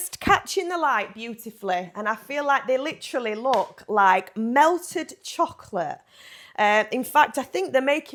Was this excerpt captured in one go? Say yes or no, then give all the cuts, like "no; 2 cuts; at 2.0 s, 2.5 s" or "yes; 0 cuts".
yes; 0 cuts